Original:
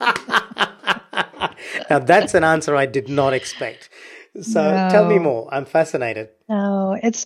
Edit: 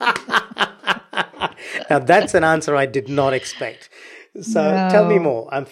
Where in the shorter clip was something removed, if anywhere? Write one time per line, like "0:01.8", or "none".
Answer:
none

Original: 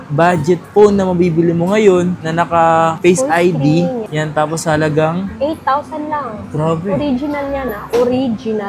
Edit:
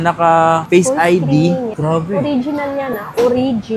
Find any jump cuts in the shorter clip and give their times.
0:01.7

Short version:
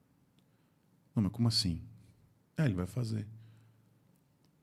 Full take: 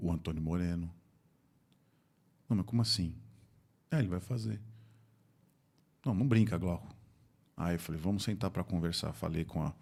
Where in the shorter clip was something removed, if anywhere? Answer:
none

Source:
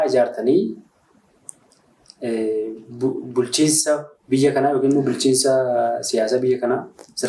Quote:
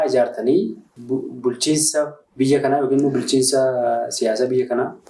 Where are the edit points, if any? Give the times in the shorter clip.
0:00.9

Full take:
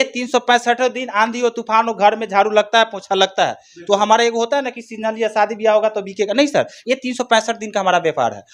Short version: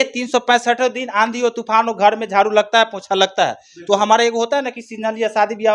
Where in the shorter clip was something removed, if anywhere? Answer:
none

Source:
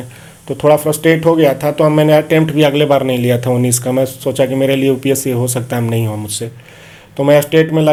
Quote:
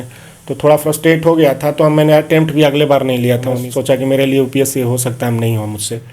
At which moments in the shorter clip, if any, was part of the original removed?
0:03.6

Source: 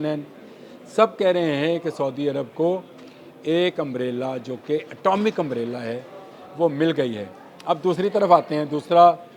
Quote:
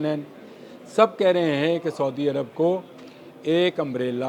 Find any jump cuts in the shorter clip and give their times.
none

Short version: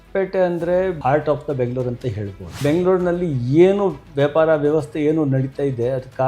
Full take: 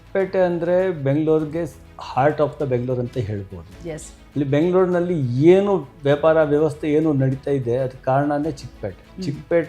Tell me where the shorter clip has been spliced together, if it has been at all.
0:01.0
0:02.6

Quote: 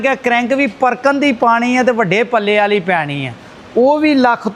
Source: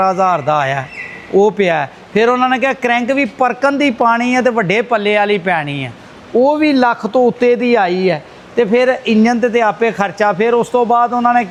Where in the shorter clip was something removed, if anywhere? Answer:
none

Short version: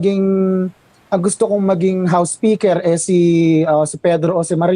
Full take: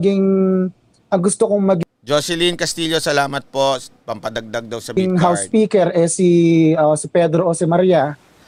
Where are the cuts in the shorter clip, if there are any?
0:01.8

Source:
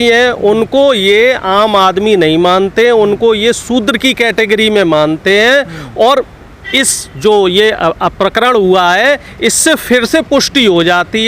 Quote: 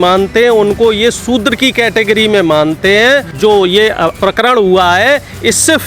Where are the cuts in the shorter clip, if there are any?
0:03.3
0:04.2

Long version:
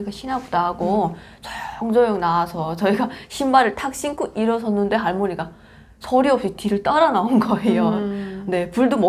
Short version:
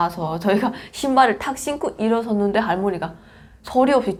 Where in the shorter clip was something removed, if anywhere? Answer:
none

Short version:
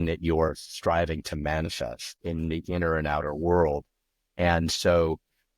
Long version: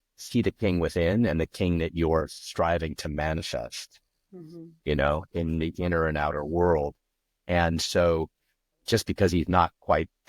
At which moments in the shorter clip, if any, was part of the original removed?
0:02.2

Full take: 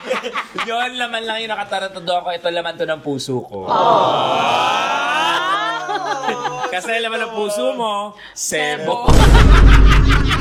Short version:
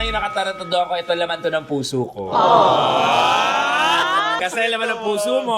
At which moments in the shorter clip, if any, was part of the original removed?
0:04.4

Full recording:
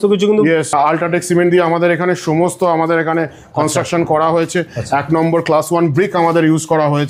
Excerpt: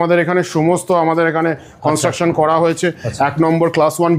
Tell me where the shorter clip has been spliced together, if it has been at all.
none

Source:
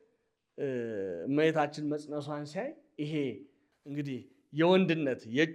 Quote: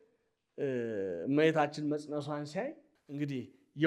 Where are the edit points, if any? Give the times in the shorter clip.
0:02.8

